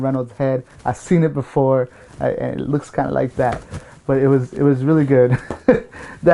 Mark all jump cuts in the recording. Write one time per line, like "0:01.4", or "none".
none